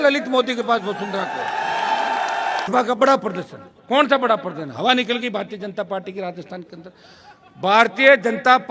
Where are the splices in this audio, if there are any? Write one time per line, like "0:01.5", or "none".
0:02.7